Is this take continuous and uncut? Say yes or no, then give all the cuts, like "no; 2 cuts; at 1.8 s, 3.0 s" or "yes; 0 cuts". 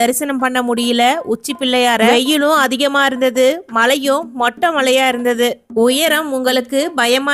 yes; 0 cuts